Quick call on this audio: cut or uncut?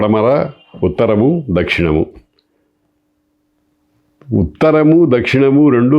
uncut